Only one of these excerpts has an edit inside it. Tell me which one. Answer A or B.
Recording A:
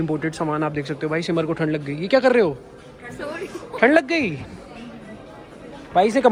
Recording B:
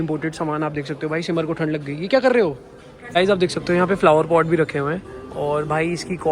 B